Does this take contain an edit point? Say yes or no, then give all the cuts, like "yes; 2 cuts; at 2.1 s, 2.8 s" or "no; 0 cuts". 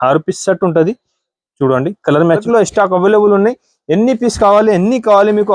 yes; 1 cut; at 2.4 s